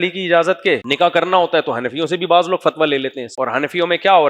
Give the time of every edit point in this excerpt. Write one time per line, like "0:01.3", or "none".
0:00.9
0:03.2